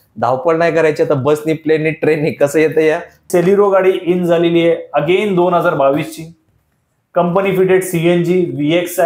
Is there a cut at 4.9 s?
no; 1 cut; at 3.3 s

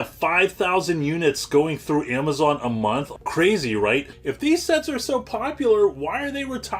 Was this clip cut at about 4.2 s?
yes; 2 cuts; at 3.1 s, 4.2 s

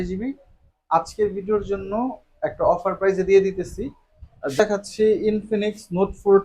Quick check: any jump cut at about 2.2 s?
no; 1 cut; at 4.6 s

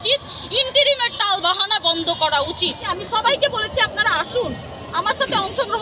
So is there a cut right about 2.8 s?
yes; 1 cut; at 2.8 s

